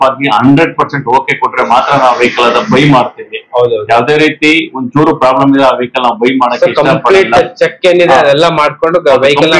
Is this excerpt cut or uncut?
uncut